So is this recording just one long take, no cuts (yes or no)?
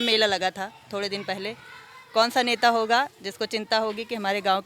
yes